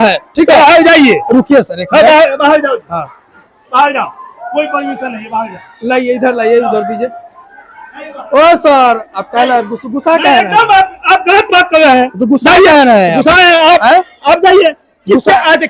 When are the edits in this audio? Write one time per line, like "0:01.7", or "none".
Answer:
none